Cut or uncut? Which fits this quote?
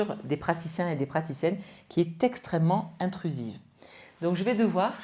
uncut